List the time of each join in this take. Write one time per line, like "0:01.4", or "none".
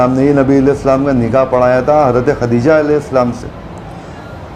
none